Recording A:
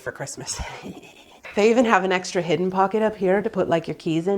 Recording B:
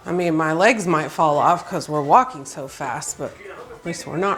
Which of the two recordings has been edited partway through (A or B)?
A